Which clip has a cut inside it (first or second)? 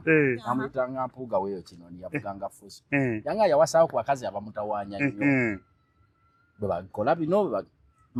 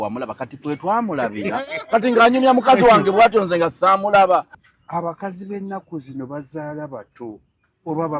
second